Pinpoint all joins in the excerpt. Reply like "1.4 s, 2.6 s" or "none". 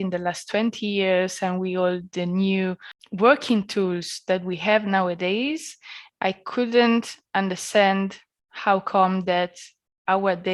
3.0 s